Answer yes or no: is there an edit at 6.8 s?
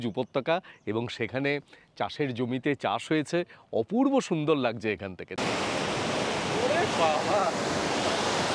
no